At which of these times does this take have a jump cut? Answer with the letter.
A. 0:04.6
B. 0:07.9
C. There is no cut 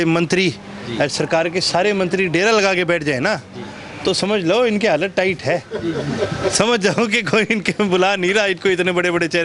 C